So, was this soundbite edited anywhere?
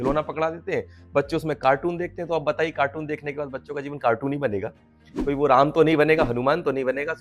no; 0 cuts

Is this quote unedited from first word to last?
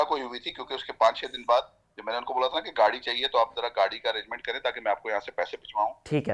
yes; 0 cuts

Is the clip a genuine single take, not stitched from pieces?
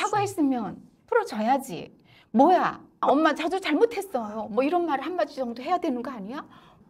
yes; 0 cuts

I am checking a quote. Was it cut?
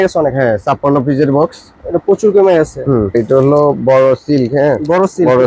yes; 1 cut; at 3.1 s

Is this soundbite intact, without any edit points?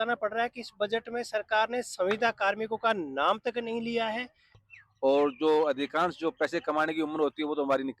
no; 1 cut; at 4.6 s

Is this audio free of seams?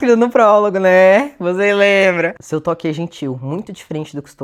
yes; 0 cuts

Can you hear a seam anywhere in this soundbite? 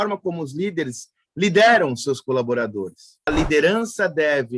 yes; 1 cut; at 3.3 s

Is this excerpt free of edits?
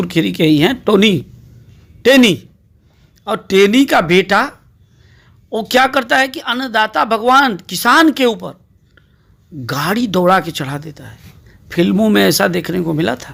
yes; 0 cuts

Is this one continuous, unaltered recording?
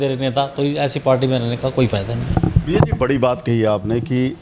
yes; 0 cuts

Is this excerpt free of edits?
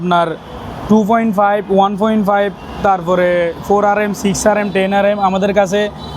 yes; 0 cuts

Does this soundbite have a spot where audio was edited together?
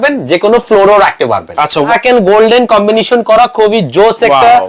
yes; 1 cut; at 1.9 s

